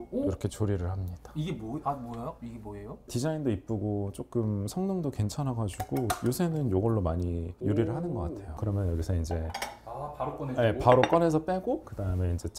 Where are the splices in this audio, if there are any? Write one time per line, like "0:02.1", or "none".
0:03.1
0:08.5